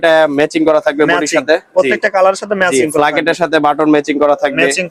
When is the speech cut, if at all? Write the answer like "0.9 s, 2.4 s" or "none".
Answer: none